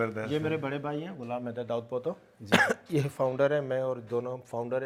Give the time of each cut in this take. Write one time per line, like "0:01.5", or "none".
none